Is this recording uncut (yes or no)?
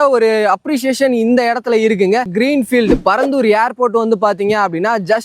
no